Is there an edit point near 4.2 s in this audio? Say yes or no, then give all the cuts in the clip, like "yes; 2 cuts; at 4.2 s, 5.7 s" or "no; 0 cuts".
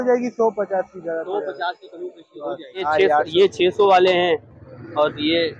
no; 1 cut; at 2.9 s